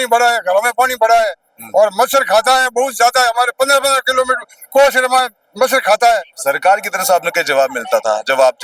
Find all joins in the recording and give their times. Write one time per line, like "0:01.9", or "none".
0:06.4